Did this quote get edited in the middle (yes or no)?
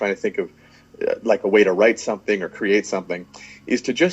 no